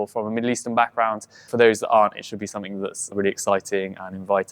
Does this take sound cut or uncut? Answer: cut